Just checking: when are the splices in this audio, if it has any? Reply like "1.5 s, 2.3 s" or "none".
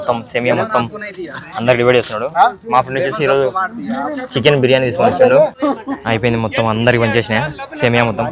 5.5 s